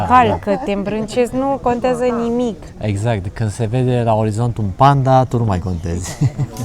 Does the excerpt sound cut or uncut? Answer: uncut